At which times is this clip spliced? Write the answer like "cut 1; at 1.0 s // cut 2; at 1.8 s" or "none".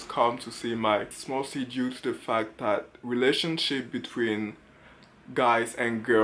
cut 1; at 1.2 s